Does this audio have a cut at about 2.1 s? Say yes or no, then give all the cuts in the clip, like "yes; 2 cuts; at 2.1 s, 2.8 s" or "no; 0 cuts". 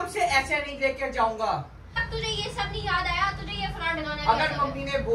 yes; 1 cut; at 2.1 s